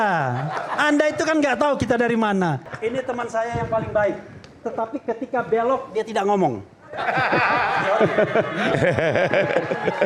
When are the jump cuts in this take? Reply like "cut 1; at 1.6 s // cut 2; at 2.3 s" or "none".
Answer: cut 1; at 2.6 s